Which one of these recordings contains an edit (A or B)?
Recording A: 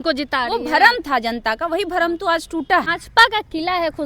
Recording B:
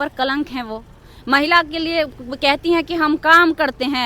A